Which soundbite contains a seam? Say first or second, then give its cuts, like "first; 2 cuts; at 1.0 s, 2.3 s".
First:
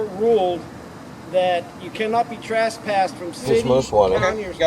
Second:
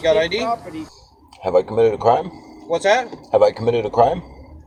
first; 1 cut; at 3.6 s